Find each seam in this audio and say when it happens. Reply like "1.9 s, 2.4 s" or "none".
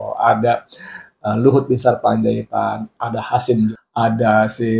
3.7 s

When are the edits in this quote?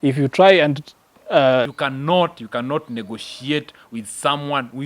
1.7 s

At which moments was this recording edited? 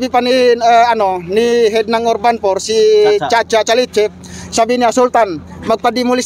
none

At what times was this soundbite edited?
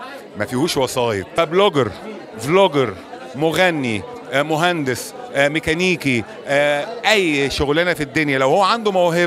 1.3 s

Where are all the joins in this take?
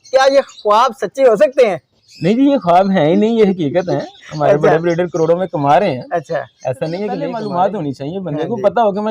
7.4 s

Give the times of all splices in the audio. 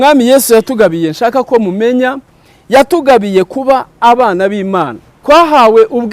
5.1 s

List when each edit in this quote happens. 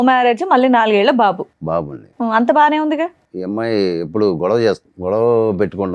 3.3 s, 4.9 s

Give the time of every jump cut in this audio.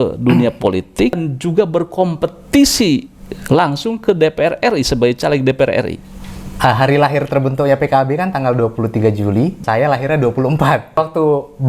1.3 s, 6.0 s, 9.6 s, 11.0 s

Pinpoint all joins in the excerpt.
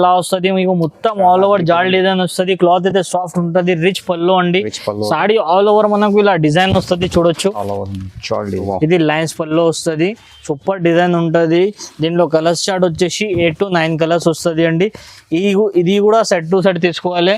8.6 s

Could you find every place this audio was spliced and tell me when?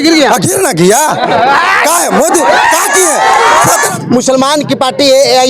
3.9 s

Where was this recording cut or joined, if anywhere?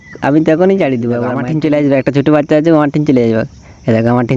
1.3 s

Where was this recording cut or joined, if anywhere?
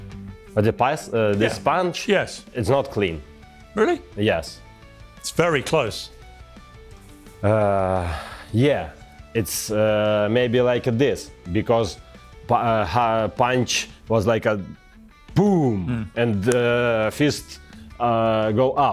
none

